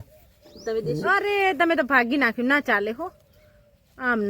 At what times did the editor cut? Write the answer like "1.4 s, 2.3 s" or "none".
1.2 s